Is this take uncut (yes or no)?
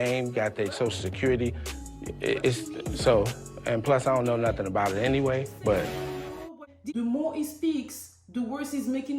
no